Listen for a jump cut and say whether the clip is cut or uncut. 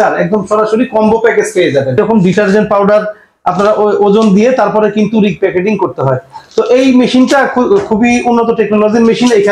cut